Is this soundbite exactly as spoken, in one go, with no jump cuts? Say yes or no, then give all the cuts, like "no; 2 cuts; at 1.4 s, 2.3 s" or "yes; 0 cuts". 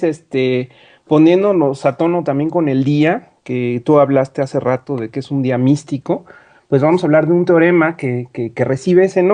no; 1 cut; at 5.8 s